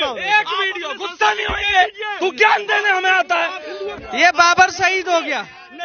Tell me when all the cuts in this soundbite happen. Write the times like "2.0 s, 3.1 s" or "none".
3.8 s